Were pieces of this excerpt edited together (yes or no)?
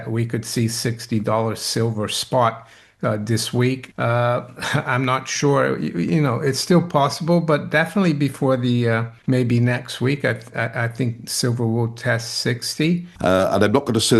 yes